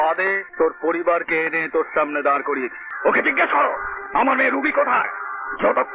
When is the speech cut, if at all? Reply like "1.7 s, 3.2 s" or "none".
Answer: 2.8 s